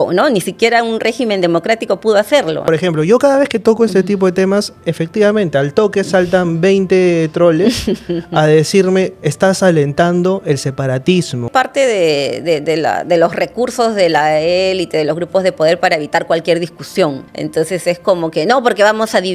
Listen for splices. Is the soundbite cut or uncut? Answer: cut